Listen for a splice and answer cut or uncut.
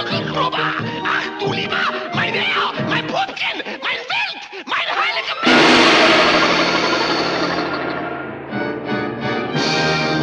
uncut